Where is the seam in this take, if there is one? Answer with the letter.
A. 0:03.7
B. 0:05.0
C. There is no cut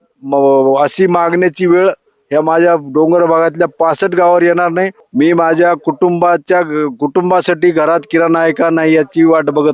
B